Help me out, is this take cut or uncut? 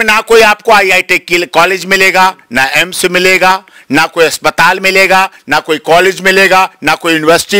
uncut